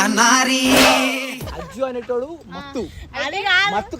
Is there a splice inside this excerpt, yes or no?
yes